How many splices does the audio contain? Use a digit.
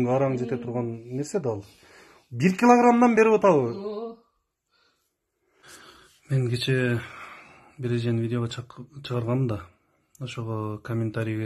1